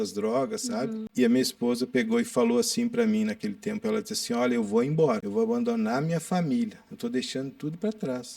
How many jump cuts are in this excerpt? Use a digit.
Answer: 2